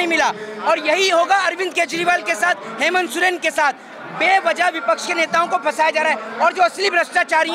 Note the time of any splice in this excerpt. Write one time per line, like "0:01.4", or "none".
none

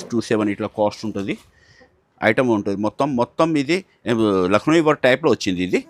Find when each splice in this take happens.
none

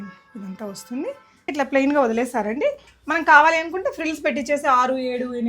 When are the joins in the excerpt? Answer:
0:01.5

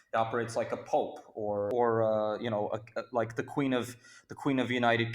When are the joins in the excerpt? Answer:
0:01.7

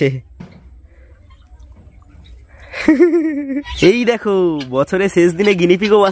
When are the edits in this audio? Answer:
0:03.4

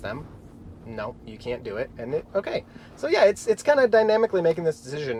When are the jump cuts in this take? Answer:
none

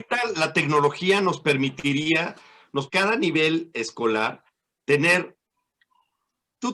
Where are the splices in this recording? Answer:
0:02.9

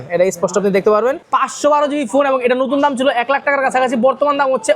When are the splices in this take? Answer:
0:01.2

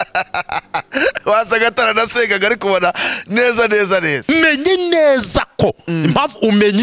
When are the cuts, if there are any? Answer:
0:04.3

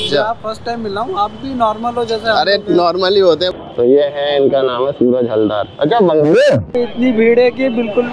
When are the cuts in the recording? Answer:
0:03.5
0:06.7

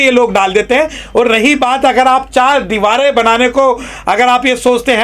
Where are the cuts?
none

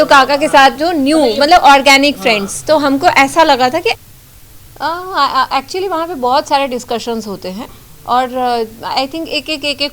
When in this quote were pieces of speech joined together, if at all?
0:03.9

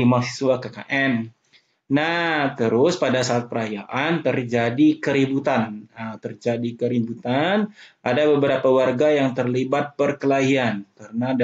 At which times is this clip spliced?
none

